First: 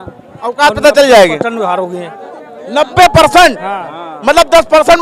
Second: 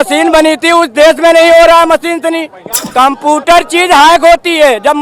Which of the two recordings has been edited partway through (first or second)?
second